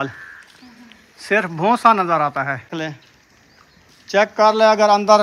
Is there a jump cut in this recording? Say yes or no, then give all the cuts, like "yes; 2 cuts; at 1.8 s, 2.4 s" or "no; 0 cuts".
yes; 1 cut; at 2.7 s